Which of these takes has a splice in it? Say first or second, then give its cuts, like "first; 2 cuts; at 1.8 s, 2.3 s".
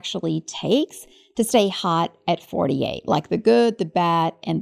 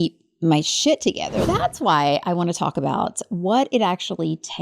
second; 1 cut; at 1.4 s